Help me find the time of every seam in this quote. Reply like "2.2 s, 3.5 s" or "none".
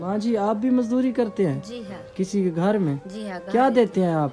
none